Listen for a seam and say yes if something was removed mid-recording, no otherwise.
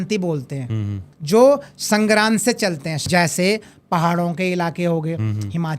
yes